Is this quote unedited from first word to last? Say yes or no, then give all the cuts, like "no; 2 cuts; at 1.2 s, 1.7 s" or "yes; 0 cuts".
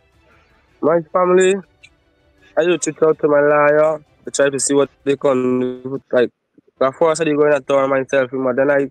yes; 0 cuts